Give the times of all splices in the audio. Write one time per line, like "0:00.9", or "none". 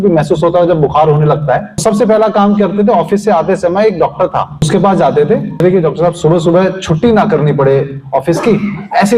0:01.7
0:04.7
0:05.6